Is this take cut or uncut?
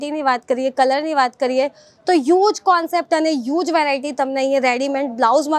uncut